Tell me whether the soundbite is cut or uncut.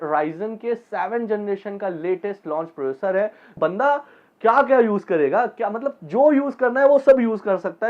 cut